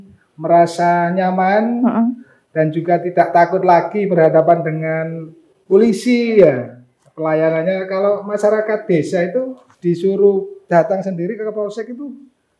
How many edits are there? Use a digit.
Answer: 2